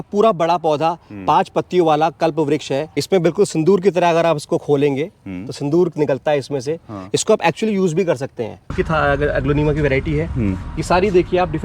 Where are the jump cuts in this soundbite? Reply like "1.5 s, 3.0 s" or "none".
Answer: 2.9 s, 8.7 s